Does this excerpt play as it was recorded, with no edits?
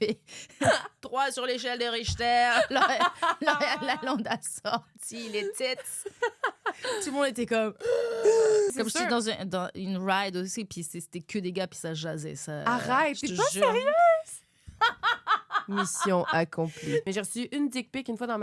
no; 2 cuts; at 8.7 s, 17.0 s

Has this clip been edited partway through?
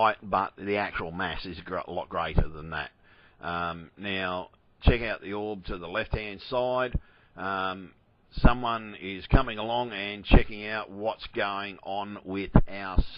no; 0 cuts

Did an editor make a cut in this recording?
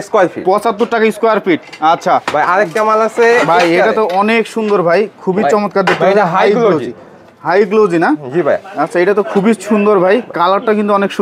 no; 0 cuts

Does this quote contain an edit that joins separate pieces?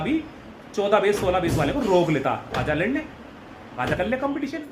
no; 0 cuts

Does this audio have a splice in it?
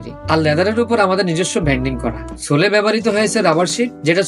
no; 0 cuts

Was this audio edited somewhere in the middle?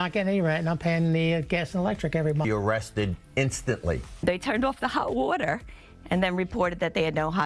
no; 0 cuts

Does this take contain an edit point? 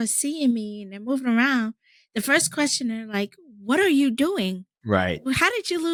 no; 0 cuts

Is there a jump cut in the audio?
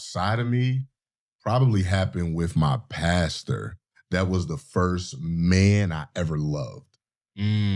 no; 0 cuts

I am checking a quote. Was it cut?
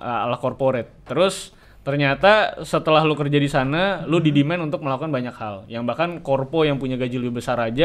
no; 0 cuts

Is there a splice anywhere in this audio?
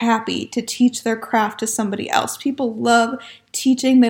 no; 0 cuts

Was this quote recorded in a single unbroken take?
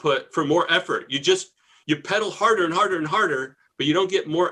yes; 0 cuts

